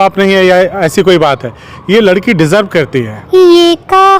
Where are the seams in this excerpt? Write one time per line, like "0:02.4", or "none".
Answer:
0:03.2